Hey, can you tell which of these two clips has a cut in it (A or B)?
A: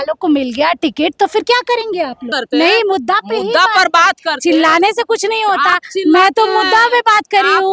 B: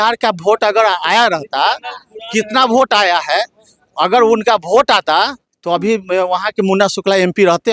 A